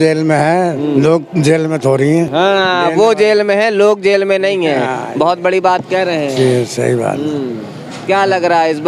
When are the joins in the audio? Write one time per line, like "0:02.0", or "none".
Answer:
none

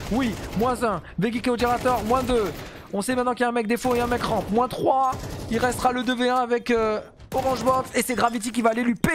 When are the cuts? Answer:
none

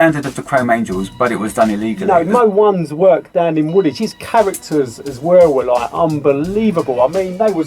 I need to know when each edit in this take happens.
0:02.0

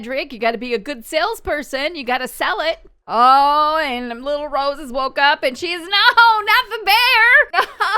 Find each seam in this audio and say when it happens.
0:02.9

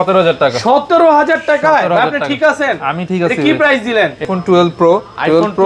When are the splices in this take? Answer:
0:04.3

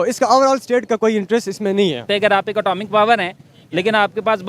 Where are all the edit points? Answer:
0:02.0

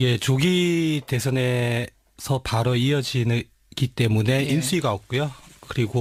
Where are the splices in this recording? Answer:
none

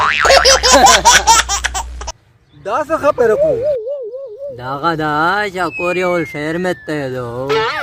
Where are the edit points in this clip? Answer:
none

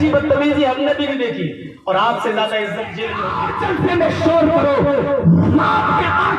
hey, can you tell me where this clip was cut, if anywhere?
0:03.1

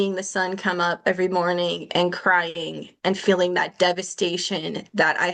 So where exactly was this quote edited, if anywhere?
none

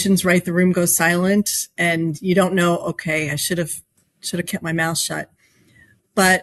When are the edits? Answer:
none

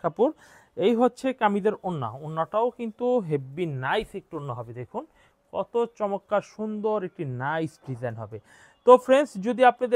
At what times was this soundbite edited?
none

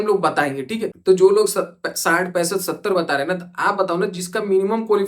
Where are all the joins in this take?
0:00.9

